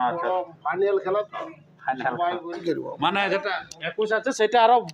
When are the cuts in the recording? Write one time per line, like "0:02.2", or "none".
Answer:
0:02.6